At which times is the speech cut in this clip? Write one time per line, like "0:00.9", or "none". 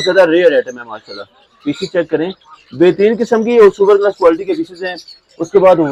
none